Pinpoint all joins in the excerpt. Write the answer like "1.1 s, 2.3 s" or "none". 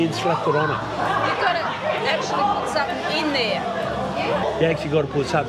none